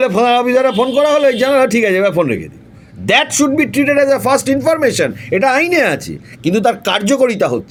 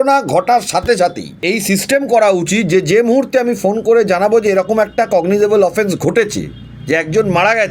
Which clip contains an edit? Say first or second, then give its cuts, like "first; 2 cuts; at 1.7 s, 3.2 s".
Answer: second; 1 cut; at 1.3 s